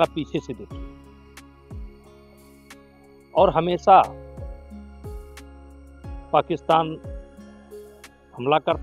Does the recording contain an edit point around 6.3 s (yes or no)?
yes